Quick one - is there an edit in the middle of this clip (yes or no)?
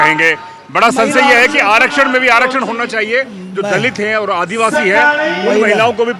no